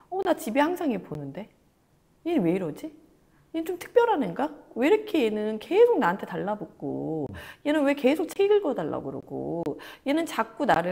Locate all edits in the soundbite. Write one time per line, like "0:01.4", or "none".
none